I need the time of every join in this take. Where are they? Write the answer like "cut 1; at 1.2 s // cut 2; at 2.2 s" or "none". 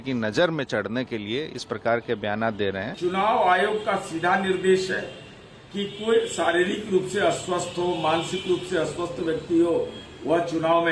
cut 1; at 2.9 s